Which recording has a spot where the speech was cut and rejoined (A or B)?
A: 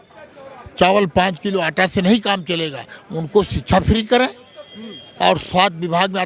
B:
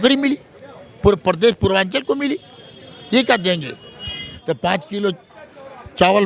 B